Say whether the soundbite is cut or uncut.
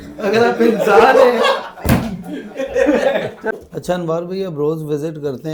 uncut